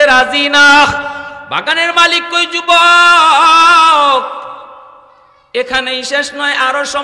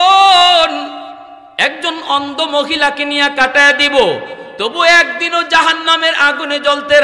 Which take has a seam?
first; 1 cut; at 1.3 s

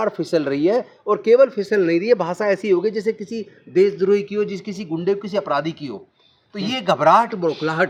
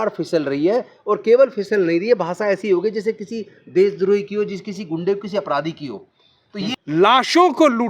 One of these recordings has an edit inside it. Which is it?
second; 1 cut; at 6.8 s

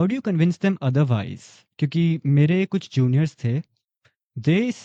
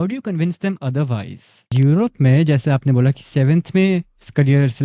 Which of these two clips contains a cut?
second; 1 cut; at 1.7 s

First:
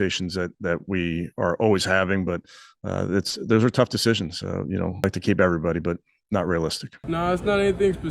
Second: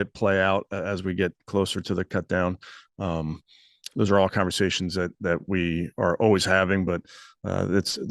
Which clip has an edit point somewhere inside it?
first; 2 cuts; at 5.0 s, 6.9 s

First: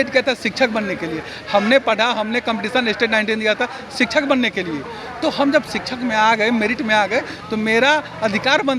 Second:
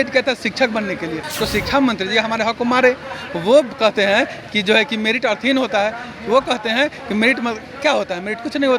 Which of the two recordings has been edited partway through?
second; 1 cut; at 1.2 s

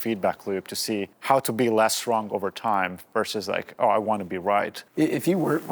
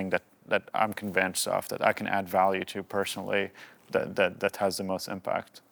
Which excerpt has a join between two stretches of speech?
first; 2 cuts; at 1.1 s, 4.8 s

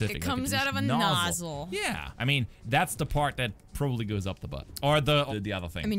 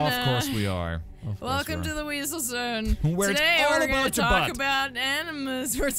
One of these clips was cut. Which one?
first; 3 cuts; at 2.1 s, 4.6 s, 5.3 s

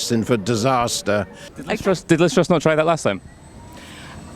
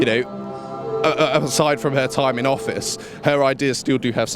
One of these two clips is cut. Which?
first; 1 cut; at 1.5 s

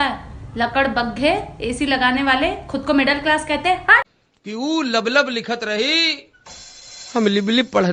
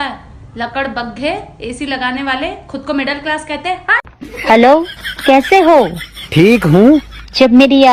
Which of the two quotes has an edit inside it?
first; 1 cut; at 4.2 s

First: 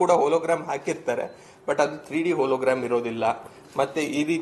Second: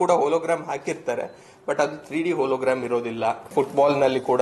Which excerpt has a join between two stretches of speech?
second; 1 cut; at 3.5 s

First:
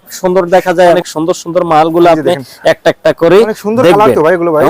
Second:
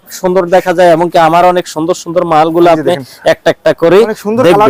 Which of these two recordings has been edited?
first; 1 cut; at 1.0 s

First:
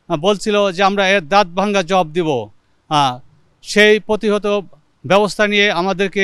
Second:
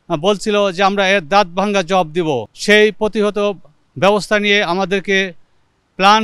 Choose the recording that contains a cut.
second; 1 cut; at 2.5 s

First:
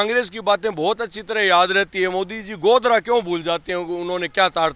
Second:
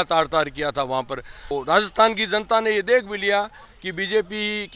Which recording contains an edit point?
second; 1 cut; at 1.5 s

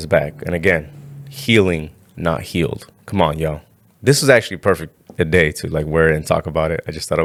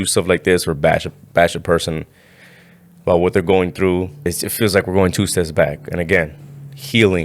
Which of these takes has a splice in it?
second; 1 cut; at 4.2 s

